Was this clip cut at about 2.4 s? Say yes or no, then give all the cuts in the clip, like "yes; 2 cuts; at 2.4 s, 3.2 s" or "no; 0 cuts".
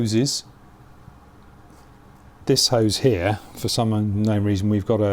yes; 1 cut; at 2.4 s